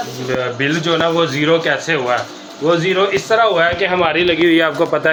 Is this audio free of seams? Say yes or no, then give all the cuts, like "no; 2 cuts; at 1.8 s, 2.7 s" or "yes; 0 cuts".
yes; 0 cuts